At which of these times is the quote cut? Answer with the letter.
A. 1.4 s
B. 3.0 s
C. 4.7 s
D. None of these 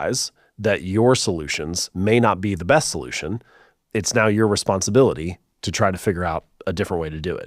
D